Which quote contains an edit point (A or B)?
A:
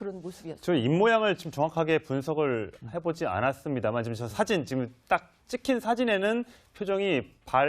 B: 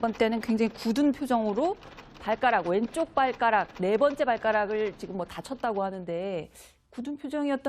A